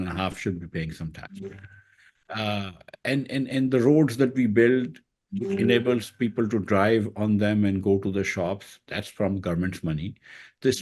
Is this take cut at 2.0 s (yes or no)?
no